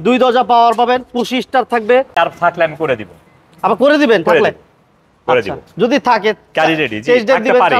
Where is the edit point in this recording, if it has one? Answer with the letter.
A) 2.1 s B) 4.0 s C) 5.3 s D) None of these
A